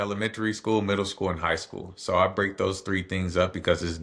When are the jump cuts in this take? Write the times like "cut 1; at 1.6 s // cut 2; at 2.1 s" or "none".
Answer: none